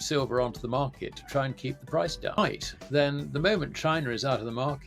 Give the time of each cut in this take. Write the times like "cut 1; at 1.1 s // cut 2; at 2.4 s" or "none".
cut 1; at 2.4 s